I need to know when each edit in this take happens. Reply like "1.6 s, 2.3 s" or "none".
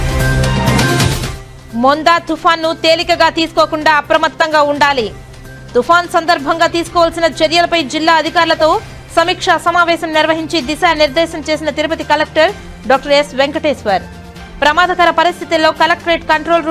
1.3 s

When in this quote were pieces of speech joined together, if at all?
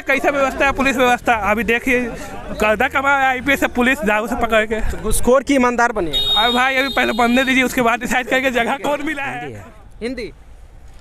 9.2 s

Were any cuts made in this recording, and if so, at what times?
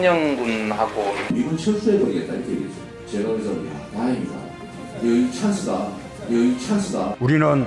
1.1 s

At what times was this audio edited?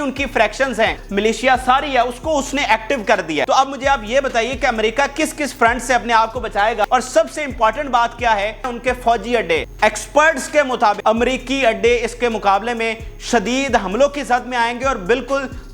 1.0 s, 3.5 s, 6.9 s, 8.7 s, 9.7 s, 11.0 s

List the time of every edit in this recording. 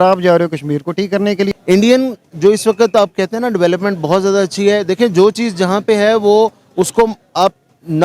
1.6 s

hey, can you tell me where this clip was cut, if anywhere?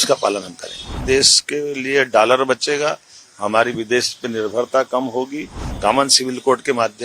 1.0 s, 5.6 s

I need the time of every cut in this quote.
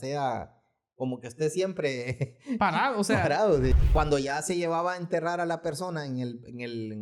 3.7 s

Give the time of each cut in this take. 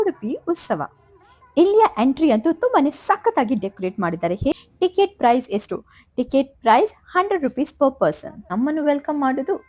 4.5 s, 8.4 s

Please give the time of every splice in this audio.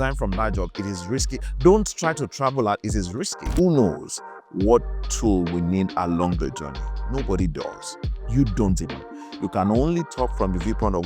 3.4 s

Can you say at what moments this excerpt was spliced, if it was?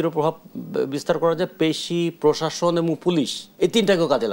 3.4 s

